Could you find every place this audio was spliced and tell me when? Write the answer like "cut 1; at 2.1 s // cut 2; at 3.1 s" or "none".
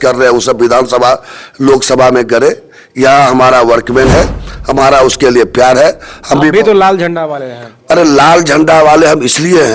none

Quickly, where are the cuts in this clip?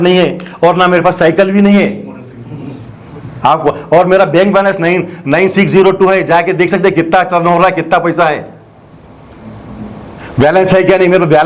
none

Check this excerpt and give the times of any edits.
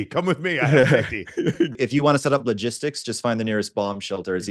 cut 1; at 1.8 s

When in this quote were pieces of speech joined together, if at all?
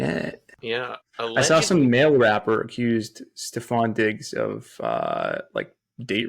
cut 1; at 0.9 s

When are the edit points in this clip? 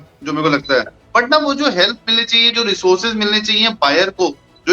cut 1; at 1.0 s

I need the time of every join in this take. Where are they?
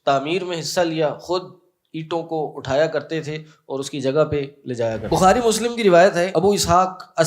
cut 1; at 5.0 s // cut 2; at 6.3 s

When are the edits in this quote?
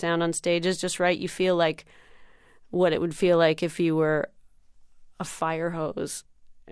cut 1; at 5.0 s

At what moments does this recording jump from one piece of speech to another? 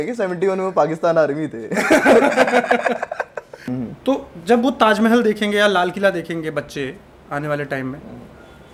cut 1; at 3.7 s

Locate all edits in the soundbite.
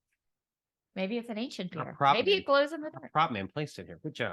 none

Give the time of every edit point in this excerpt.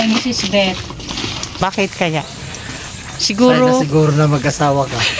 cut 1; at 1.6 s

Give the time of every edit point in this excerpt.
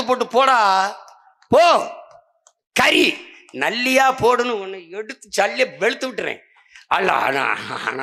none

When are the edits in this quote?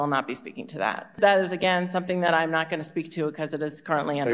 cut 1; at 1.1 s

